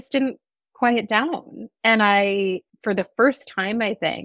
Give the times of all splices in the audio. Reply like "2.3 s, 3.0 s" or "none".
2.7 s